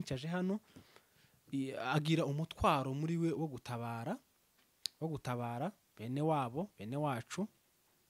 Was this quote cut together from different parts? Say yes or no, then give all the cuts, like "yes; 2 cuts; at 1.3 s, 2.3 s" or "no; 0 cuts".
no; 0 cuts